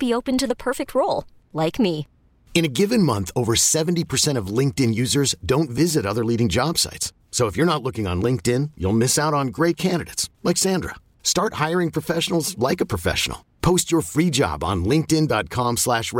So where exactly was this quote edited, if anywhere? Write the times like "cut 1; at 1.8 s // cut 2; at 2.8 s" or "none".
none